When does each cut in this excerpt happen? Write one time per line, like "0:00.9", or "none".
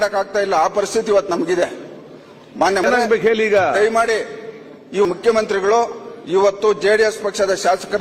0:02.8
0:05.0